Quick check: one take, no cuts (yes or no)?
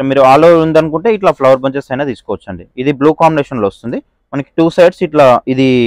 yes